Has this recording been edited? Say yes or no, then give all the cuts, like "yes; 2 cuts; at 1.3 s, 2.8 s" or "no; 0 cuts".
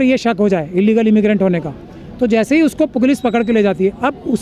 no; 0 cuts